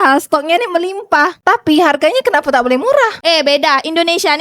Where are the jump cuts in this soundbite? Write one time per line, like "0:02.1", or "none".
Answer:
0:03.2